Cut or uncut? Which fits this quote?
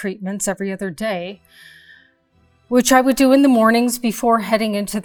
uncut